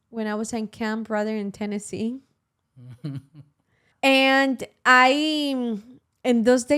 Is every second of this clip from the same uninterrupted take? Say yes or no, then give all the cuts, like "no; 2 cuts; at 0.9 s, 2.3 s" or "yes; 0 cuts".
no; 1 cut; at 3.8 s